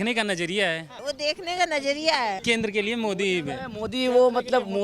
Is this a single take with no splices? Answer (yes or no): no